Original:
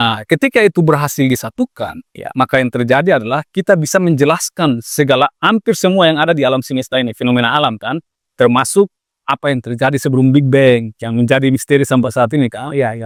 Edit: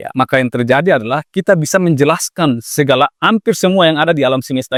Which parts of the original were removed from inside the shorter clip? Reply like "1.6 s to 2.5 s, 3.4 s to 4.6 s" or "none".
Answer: none